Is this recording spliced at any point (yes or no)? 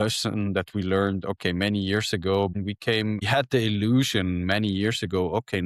no